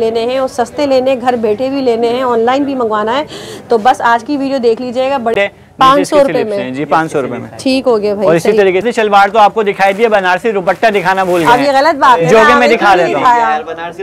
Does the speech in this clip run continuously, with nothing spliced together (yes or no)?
no